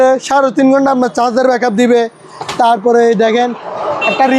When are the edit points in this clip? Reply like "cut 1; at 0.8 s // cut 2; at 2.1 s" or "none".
none

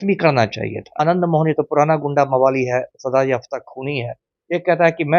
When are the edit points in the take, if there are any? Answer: cut 1; at 1.0 s

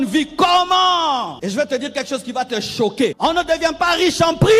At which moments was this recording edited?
cut 1; at 1.3 s // cut 2; at 3.2 s

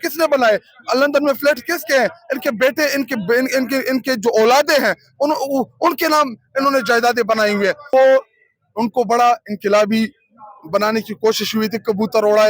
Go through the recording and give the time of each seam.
cut 1; at 7.9 s

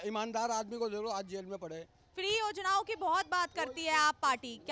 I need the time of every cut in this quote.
none

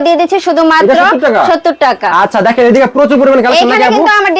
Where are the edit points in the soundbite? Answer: none

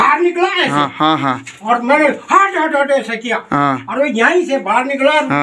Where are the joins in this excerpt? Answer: none

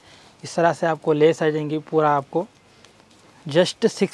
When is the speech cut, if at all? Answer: none

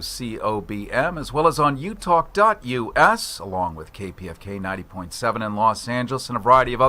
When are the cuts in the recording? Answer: cut 1; at 4.8 s

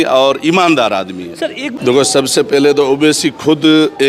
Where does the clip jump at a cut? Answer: cut 1; at 1.6 s

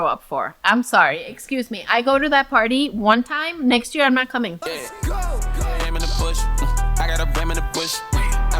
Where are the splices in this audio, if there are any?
cut 1; at 4.6 s

